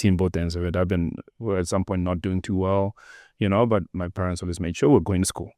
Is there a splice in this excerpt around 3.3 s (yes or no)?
no